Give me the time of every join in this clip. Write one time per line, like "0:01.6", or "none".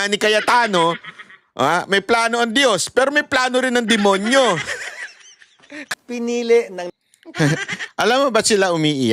0:05.9